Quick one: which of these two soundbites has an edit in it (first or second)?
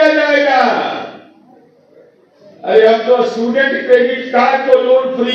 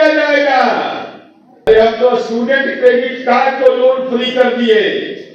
second